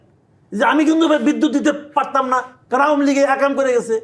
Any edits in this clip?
yes; 1 cut; at 2.5 s

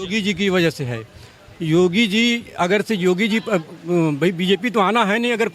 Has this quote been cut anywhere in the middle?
no; 0 cuts

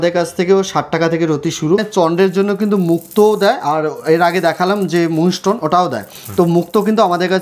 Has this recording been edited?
yes; 1 cut; at 1.9 s

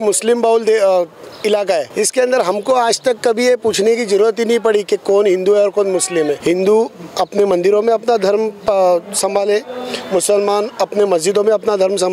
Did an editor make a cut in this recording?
yes; 2 cuts; at 1.9 s, 6.4 s

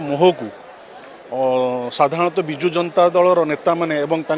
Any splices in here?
no; 0 cuts

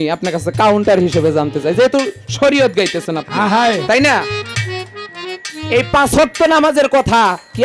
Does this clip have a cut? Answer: no; 0 cuts

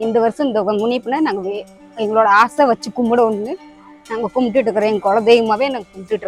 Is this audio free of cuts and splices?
yes; 0 cuts

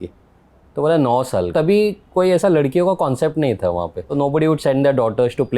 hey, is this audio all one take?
no; 2 cuts; at 1.5 s, 4.0 s

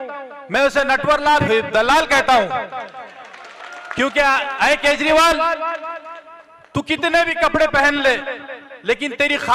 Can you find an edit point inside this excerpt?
yes; 1 cut; at 1.4 s

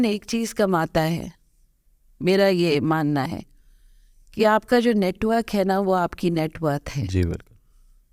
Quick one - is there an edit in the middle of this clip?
no; 0 cuts

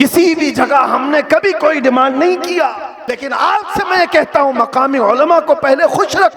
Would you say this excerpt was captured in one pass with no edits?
no; 1 cut; at 3.0 s

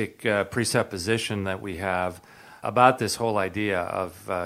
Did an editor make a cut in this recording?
yes; 1 cut; at 2.6 s

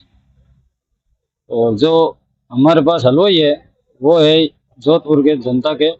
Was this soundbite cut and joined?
no; 0 cuts

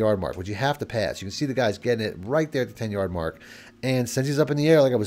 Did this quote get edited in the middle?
no; 0 cuts

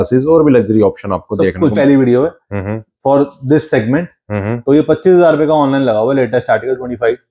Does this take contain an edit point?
yes; 1 cut; at 1.8 s

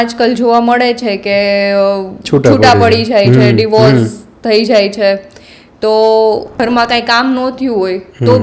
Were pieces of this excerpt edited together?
yes; 1 cut; at 6.6 s

